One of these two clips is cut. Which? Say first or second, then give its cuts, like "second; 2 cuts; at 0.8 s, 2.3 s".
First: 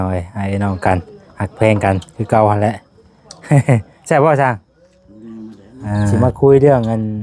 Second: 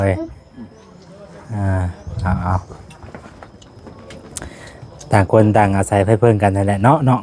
first; 1 cut; at 6.1 s